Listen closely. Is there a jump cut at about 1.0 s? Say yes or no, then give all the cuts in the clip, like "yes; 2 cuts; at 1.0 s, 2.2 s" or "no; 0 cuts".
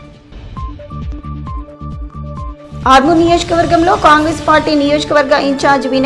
yes; 1 cut; at 1.0 s